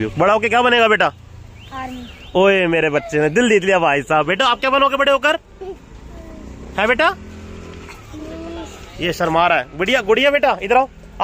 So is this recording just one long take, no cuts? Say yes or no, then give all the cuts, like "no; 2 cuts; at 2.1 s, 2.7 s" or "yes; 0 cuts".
yes; 0 cuts